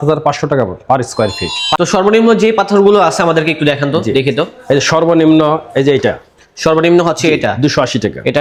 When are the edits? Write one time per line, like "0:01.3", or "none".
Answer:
none